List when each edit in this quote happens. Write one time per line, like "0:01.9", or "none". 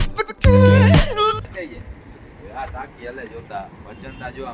0:01.4